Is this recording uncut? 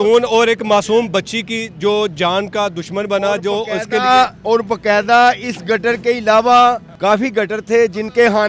no; 1 cut; at 6.9 s

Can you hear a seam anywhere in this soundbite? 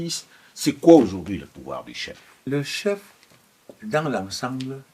yes; 1 cut; at 2.4 s

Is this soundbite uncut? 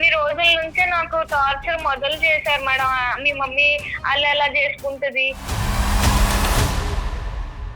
no; 1 cut; at 5.4 s

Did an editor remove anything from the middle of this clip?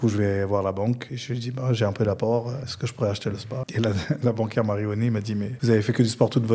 yes; 4 cuts; at 1.1 s, 2.7 s, 3.7 s, 5.5 s

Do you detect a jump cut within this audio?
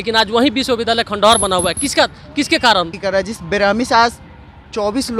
yes; 1 cut; at 2.9 s

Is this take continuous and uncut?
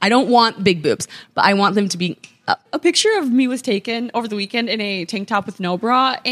no; 1 cut; at 2.7 s

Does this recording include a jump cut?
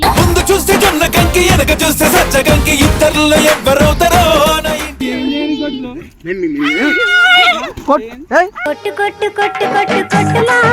yes; 1 cut; at 5.0 s

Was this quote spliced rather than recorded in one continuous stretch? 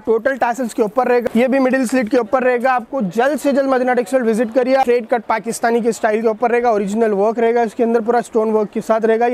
yes; 2 cuts; at 1.2 s, 4.8 s

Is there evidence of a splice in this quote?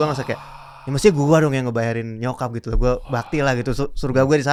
no; 0 cuts

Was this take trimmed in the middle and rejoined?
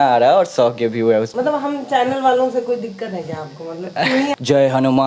yes; 2 cuts; at 1.3 s, 4.3 s

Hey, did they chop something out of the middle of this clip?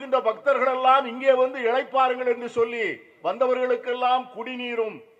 no; 0 cuts

